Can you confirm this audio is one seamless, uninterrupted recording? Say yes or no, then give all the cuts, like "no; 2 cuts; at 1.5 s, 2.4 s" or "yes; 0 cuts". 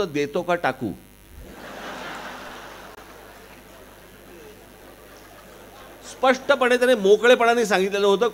yes; 0 cuts